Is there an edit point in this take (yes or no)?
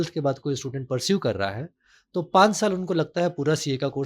no